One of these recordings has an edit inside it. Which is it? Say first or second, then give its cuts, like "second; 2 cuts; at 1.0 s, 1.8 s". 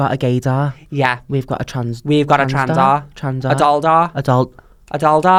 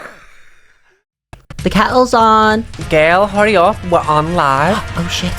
second; 1 cut; at 1.2 s